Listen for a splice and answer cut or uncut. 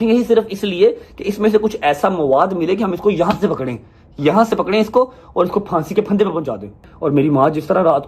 cut